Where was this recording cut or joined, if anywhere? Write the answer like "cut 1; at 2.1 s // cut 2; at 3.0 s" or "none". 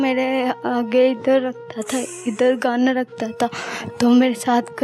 none